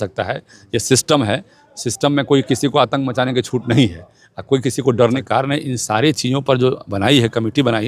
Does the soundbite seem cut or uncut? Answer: cut